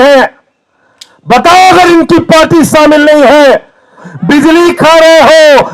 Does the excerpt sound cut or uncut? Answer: cut